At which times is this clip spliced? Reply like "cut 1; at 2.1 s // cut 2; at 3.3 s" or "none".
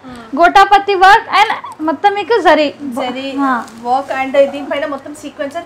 none